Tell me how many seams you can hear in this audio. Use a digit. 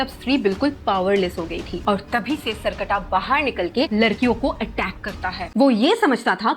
2